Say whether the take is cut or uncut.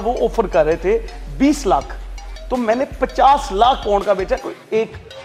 uncut